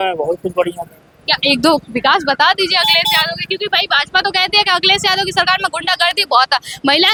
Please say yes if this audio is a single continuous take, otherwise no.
yes